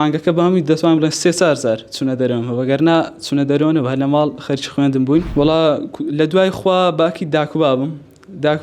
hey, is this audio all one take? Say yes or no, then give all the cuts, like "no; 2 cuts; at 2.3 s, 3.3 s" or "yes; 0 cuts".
no; 1 cut; at 5.3 s